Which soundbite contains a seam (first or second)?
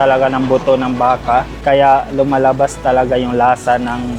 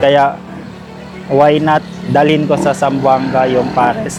first